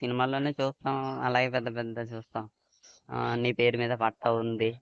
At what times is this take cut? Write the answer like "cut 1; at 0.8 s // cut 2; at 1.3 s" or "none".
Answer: none